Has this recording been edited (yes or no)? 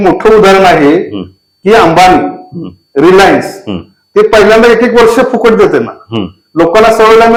no